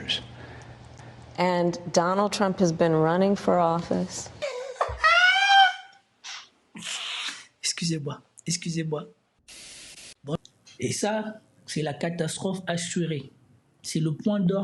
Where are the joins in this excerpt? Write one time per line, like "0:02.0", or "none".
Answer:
0:10.1